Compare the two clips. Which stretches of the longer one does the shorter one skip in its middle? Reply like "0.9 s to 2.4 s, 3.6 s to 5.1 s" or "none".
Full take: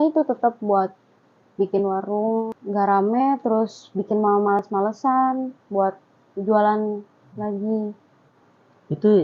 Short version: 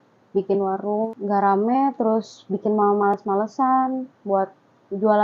2.3 s to 2.5 s